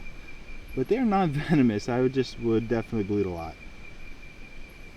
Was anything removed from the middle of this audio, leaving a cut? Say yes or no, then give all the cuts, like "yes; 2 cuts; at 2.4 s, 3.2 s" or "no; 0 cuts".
no; 0 cuts